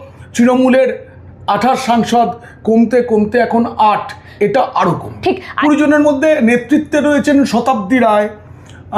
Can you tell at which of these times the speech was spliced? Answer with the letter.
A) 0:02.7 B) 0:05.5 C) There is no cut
B